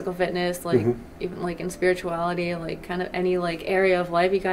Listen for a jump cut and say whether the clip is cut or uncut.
uncut